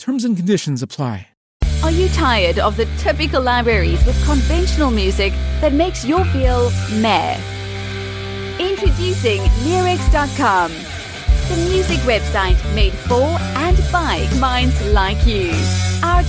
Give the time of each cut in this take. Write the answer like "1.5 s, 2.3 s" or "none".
1.6 s